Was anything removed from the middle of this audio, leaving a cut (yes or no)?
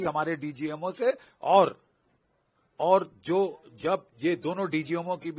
no